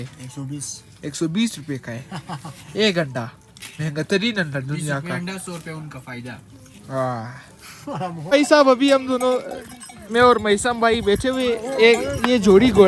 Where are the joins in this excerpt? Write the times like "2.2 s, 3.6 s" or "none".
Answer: none